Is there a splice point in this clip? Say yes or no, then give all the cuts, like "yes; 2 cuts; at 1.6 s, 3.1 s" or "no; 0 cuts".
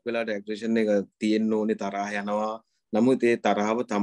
no; 0 cuts